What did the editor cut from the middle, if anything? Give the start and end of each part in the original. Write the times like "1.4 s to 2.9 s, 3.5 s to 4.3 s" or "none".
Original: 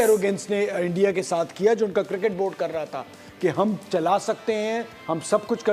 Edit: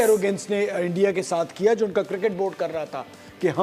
none